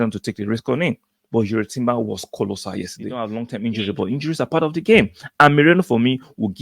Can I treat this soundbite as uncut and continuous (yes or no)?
no